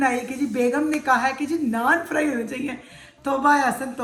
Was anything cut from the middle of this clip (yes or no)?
no